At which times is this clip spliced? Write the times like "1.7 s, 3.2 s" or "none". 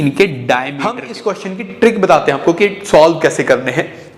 1.1 s